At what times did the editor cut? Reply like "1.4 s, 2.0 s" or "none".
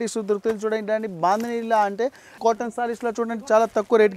2.4 s